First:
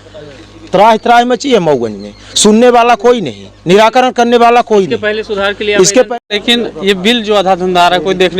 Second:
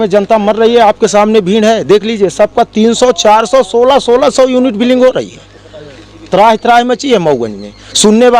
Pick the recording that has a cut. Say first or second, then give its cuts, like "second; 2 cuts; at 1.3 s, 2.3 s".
first; 1 cut; at 6.2 s